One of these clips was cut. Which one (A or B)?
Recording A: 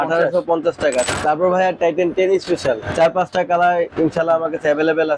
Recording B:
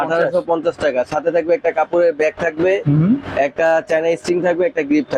A